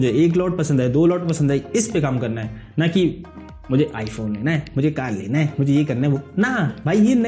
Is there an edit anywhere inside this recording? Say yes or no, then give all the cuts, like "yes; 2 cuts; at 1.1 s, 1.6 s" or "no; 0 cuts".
no; 0 cuts